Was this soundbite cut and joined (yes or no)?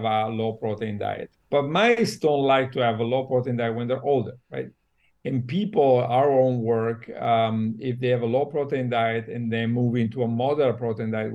no